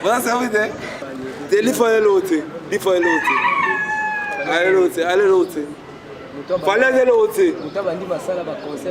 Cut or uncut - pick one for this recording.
cut